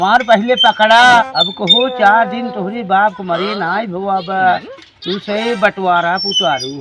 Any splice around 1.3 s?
yes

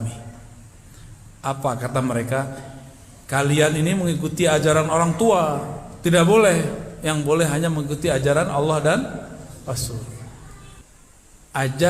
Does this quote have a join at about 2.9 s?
no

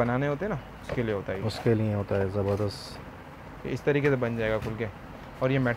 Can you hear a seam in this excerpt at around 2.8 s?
no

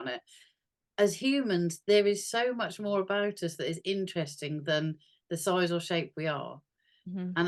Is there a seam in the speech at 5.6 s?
no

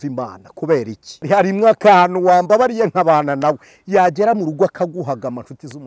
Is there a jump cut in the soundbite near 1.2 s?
yes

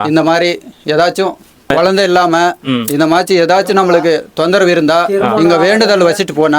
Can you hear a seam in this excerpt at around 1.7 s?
yes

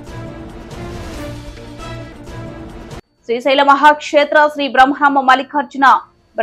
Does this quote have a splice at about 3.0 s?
yes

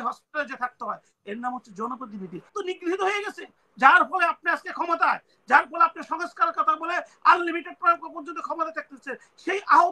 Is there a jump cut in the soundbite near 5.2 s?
no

